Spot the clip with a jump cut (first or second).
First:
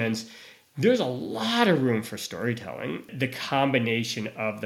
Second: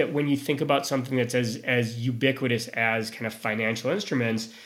first